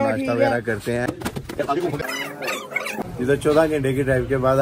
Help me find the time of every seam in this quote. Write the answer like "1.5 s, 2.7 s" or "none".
1.0 s, 3.0 s